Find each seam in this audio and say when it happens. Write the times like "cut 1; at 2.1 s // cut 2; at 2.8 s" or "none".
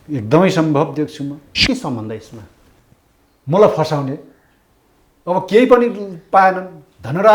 cut 1; at 1.5 s